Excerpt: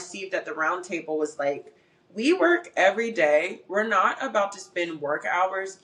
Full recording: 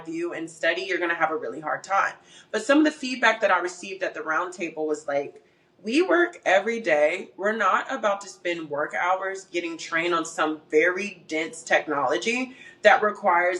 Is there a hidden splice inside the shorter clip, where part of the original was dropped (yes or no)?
no